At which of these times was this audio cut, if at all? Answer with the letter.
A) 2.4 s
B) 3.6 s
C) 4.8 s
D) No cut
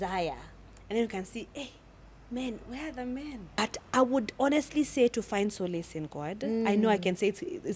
B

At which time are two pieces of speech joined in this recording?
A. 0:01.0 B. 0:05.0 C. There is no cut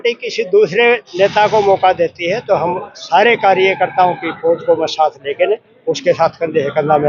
C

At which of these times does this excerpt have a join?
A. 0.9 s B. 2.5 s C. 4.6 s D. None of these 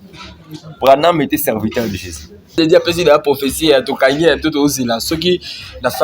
B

